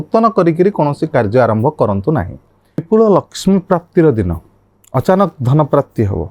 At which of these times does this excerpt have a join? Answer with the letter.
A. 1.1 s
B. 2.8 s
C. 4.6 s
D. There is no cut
B